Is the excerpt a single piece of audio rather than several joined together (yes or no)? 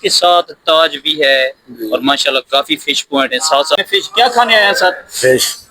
no